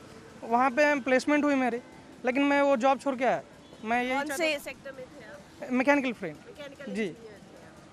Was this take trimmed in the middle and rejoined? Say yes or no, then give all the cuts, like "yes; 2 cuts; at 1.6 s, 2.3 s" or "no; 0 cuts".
no; 0 cuts